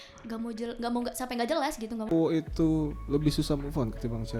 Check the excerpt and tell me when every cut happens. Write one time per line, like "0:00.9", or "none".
0:02.1